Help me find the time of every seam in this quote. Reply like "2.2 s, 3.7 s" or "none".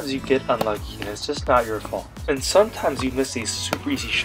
2.1 s